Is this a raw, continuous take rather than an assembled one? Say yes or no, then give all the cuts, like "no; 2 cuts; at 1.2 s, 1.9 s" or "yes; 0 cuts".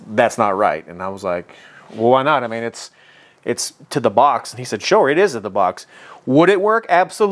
yes; 0 cuts